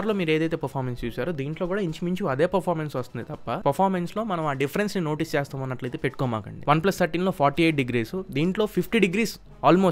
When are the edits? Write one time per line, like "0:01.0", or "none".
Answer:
0:03.6
0:06.6